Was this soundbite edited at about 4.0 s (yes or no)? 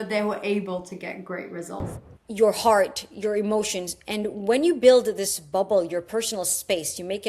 no